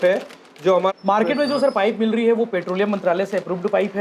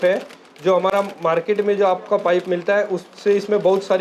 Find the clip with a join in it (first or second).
first